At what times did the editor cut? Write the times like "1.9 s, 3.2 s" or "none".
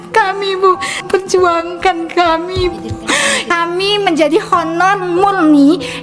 none